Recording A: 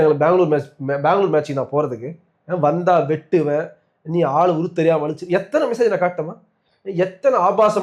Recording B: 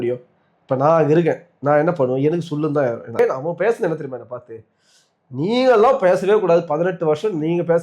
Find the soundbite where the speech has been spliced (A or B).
B